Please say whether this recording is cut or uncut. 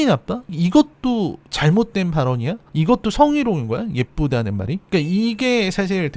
cut